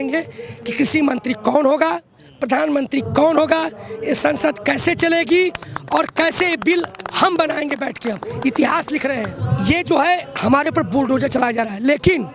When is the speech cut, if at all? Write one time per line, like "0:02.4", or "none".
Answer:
0:09.4